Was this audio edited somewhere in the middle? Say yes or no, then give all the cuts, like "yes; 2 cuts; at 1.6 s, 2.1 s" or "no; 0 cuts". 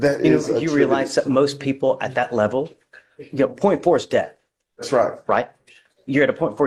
no; 0 cuts